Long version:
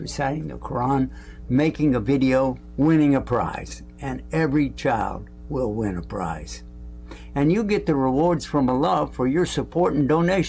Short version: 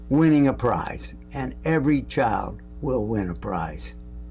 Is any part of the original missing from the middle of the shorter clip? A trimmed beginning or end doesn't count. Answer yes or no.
no